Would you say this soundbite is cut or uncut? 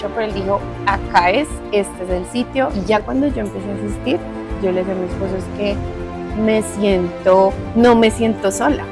cut